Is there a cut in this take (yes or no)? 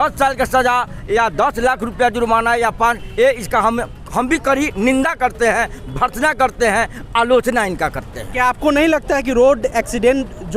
no